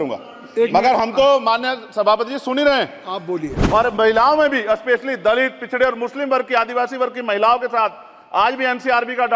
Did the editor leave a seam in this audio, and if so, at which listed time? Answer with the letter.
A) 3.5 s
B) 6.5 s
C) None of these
A